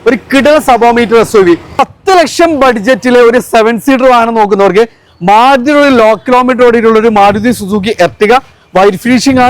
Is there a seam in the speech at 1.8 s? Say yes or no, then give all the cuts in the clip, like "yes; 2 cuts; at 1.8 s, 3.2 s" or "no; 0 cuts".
yes; 1 cut; at 1.8 s